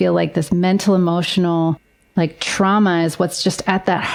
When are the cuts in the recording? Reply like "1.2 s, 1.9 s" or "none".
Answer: none